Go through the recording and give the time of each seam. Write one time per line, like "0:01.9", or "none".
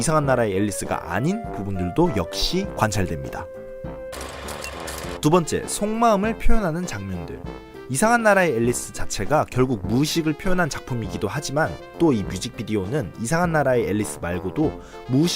0:12.2